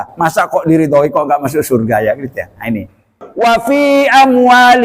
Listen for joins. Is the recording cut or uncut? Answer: cut